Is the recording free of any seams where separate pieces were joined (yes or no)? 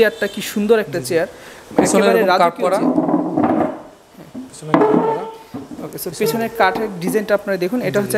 yes